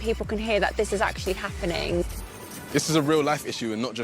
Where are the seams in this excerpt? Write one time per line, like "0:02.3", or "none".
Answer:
0:02.2